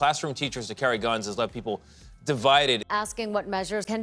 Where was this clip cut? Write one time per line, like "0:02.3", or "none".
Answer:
0:02.9